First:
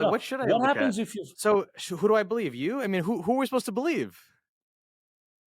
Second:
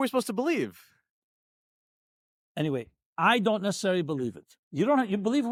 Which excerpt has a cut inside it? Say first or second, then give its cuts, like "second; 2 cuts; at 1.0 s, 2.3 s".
first; 1 cut; at 1.2 s